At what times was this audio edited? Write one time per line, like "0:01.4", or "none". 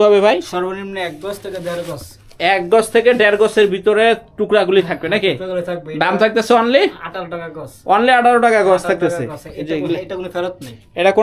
none

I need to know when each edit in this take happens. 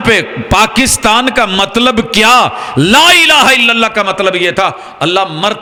none

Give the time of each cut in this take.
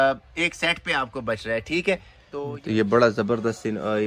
0:02.2

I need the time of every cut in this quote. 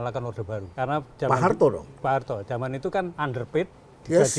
none

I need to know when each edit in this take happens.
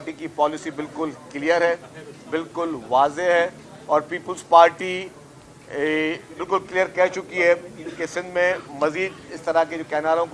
none

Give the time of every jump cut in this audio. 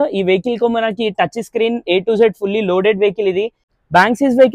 0:03.6

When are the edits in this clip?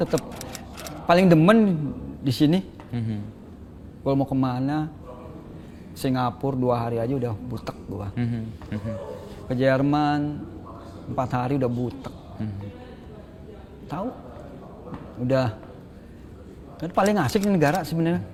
none

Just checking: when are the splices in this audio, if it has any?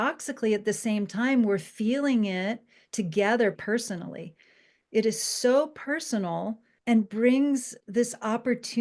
0:03.6
0:06.7
0:07.8

